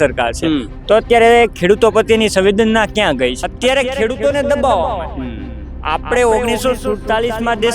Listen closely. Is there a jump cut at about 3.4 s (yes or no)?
yes